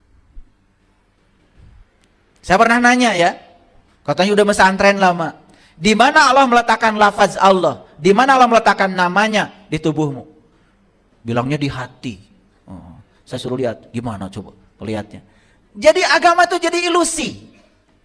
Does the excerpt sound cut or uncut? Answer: uncut